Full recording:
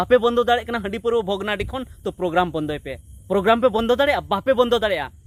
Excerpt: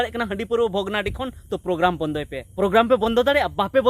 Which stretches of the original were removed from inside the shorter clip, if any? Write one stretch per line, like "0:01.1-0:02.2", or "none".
0:02.9-0:03.1